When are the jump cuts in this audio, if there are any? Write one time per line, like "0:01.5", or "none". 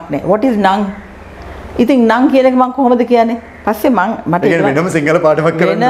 none